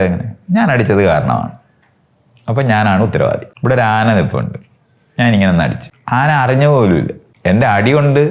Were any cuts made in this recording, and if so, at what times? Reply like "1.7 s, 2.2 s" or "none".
3.5 s, 5.9 s, 7.2 s